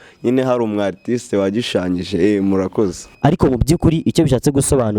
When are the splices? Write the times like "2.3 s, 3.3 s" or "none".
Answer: 3.0 s